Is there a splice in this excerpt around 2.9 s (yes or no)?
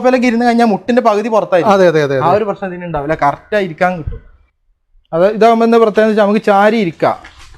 no